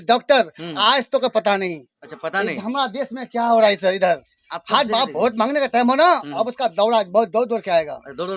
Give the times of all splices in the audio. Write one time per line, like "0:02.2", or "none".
none